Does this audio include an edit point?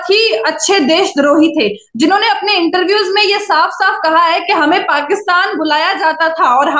no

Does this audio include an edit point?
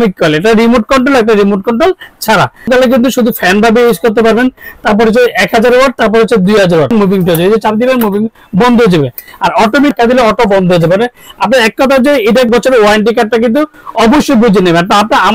yes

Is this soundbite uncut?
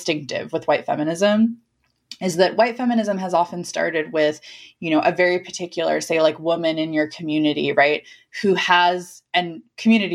yes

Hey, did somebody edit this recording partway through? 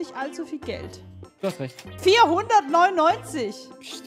yes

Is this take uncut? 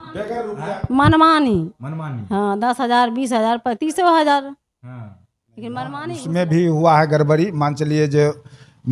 no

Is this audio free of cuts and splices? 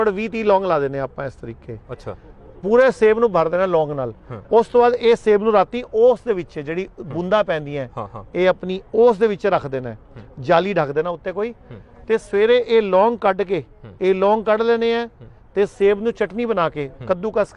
yes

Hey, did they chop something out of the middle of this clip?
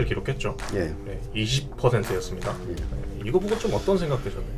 no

